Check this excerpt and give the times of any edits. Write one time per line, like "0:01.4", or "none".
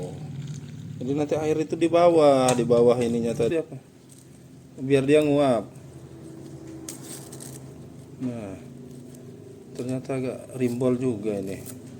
0:03.5